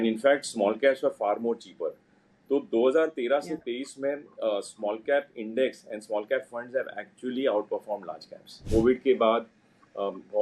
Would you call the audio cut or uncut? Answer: cut